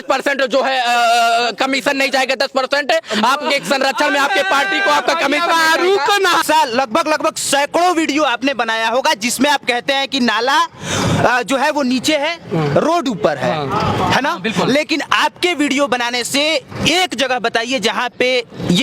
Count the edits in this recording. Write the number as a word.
one